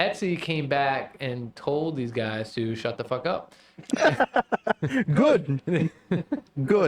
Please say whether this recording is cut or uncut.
uncut